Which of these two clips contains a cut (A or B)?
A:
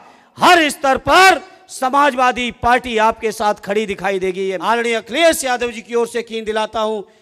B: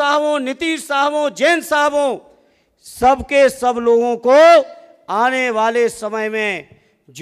A